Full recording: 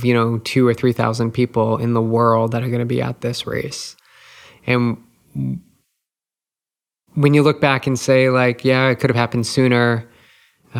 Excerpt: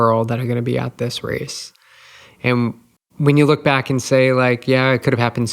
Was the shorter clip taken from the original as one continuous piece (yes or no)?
no